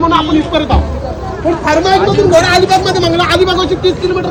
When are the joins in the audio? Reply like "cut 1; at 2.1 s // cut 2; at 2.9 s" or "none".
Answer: none

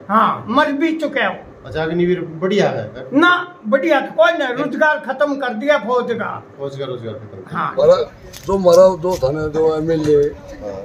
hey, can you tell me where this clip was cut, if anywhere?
cut 1; at 7.7 s

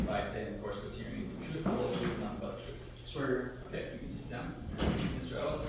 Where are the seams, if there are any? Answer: none

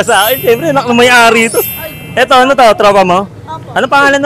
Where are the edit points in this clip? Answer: none

